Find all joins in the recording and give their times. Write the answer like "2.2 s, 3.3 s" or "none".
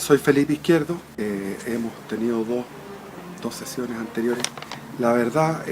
1.1 s